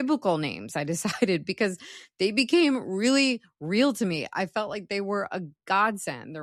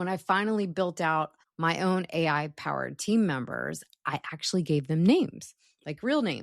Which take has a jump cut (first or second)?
second